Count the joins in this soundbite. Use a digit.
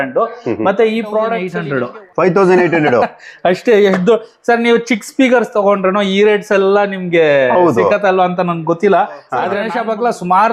2